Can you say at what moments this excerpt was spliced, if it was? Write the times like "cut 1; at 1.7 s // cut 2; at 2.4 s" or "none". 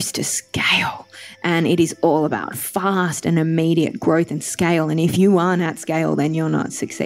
cut 1; at 5.1 s